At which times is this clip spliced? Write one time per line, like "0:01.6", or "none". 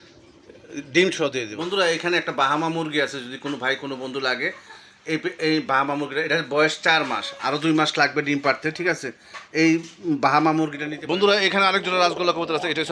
0:01.5
0:10.9

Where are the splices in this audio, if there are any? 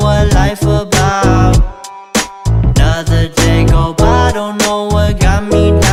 none

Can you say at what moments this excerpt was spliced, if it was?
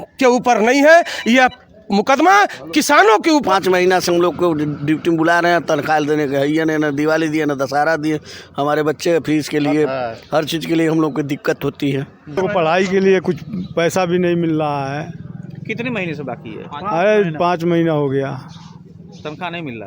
0:03.4
0:12.4

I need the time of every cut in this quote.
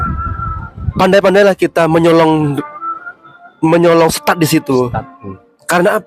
none

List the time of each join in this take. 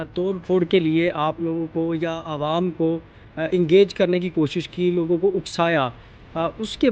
none

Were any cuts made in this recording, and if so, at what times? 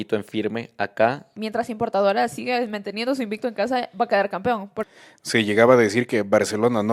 0:01.3
0:04.8

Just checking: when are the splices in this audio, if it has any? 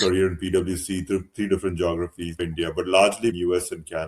0:02.4
0:03.4

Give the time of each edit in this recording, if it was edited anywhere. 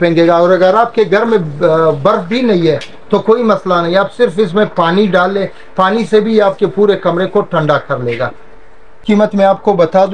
0:08.8

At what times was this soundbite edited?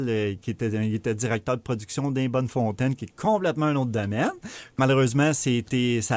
0:04.8

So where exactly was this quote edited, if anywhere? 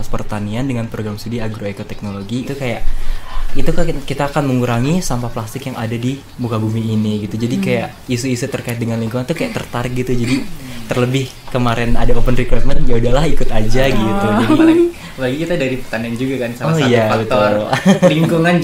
0:02.4

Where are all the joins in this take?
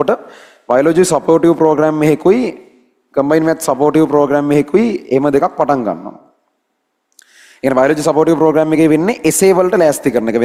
none

